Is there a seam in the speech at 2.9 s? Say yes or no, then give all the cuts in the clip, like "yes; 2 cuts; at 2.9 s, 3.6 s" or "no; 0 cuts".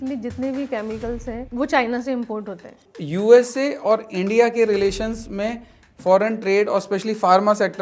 yes; 2 cuts; at 1.4 s, 2.9 s